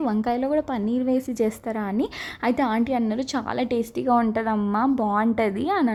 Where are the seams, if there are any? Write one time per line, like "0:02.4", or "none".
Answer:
none

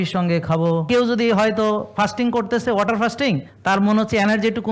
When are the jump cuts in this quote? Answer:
0:00.9
0:03.5

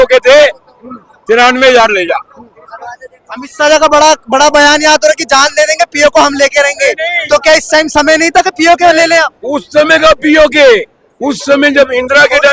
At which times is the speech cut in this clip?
none

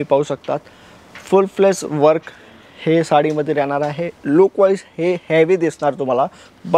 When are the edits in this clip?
none

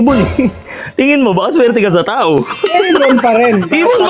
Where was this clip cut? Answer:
none

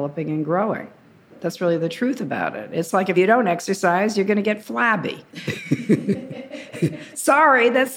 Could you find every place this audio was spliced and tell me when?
0:01.4
0:03.1

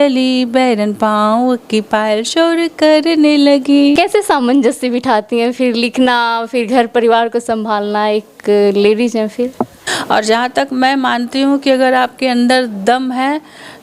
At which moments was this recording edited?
0:04.0
0:09.9

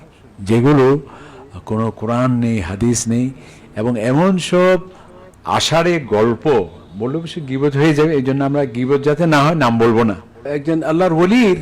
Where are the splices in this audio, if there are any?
0:10.5

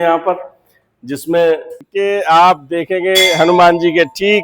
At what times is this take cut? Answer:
0:01.8

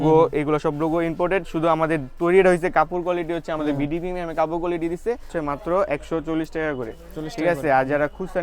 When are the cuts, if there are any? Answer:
0:05.3

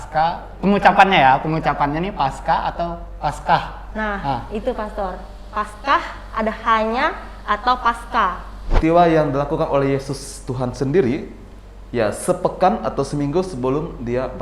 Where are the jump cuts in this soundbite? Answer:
0:08.7

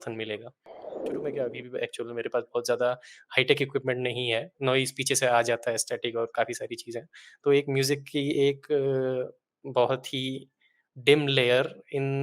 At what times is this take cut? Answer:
0:01.1

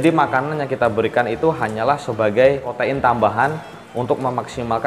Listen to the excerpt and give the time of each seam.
0:02.7

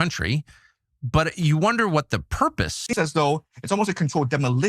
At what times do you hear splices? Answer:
0:03.0

